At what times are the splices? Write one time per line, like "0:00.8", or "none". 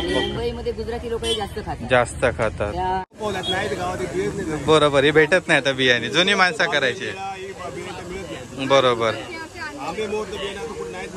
0:03.1